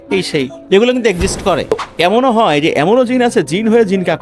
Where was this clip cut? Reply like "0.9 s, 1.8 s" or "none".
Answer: 1.8 s